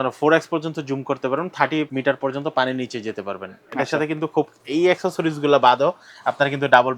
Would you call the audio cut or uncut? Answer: uncut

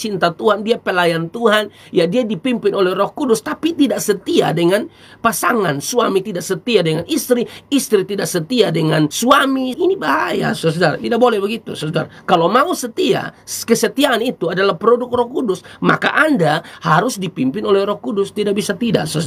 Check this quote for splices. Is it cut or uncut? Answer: cut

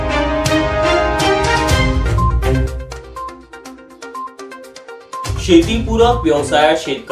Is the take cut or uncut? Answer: cut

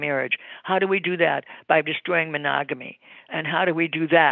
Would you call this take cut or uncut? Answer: cut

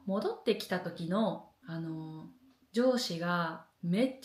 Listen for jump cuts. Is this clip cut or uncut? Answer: uncut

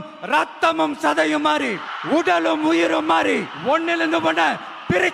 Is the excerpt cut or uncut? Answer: cut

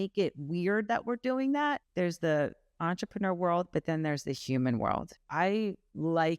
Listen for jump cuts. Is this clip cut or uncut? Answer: cut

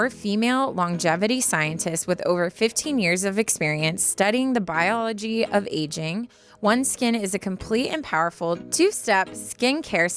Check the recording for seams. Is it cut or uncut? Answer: uncut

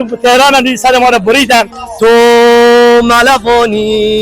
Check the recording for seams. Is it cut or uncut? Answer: cut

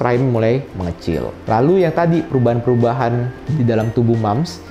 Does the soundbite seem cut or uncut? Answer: uncut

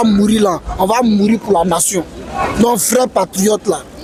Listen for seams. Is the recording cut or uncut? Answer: uncut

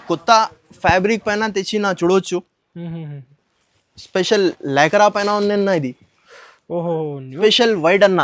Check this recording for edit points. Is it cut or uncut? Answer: cut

